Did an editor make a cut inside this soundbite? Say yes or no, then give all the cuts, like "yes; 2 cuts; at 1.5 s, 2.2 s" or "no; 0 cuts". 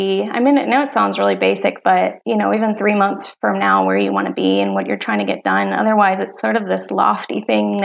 yes; 1 cut; at 2.2 s